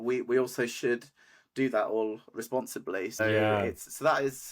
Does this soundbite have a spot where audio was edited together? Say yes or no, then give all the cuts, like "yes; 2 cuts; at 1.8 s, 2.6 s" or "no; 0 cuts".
yes; 1 cut; at 3.2 s